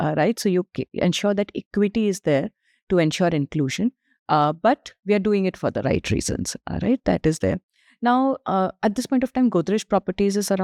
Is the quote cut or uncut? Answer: uncut